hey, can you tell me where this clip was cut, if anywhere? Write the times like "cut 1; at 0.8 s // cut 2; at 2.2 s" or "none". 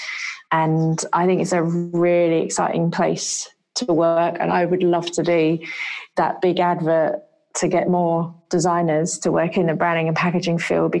cut 1; at 8.4 s